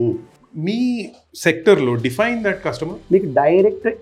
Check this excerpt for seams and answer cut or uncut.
cut